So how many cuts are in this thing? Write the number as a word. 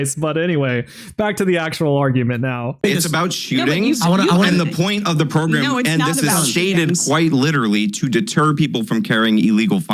zero